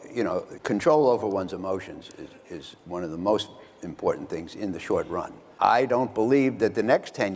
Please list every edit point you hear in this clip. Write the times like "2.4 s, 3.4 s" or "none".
5.5 s